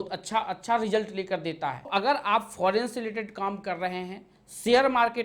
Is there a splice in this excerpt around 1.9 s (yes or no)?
yes